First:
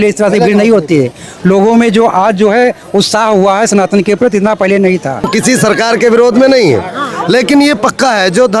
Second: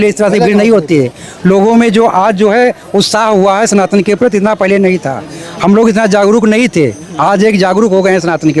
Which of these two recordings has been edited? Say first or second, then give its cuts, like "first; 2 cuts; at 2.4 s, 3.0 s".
first; 1 cut; at 5.3 s